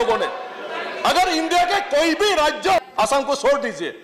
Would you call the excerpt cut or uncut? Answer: cut